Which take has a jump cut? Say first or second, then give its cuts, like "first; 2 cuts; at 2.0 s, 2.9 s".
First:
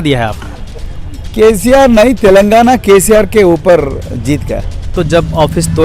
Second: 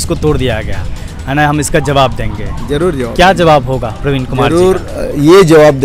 first; 1 cut; at 4.8 s